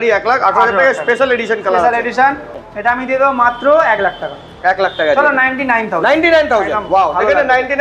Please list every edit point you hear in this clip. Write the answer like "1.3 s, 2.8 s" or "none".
3.0 s